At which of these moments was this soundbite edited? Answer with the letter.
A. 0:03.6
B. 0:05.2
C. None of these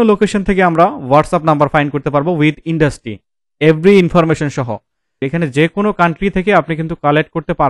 B